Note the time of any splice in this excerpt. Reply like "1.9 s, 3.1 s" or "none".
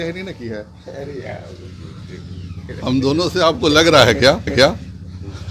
none